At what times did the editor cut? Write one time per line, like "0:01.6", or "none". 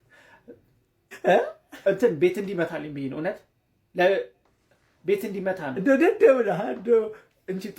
none

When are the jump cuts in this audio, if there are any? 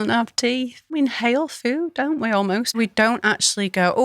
0:01.0
0:02.8

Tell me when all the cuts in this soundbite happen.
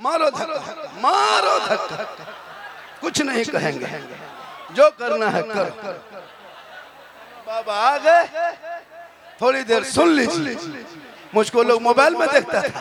none

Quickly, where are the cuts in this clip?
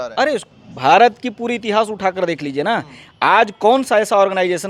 none

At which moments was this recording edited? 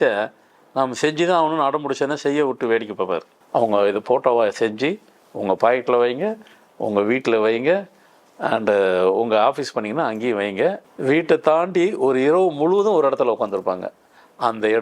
0:03.3
0:10.9

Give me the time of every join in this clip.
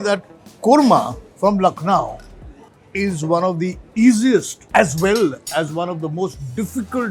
0:01.2
0:04.6

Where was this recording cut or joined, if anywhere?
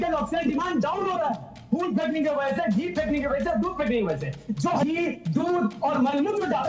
0:04.8

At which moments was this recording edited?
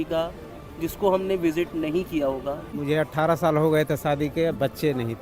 0:02.7

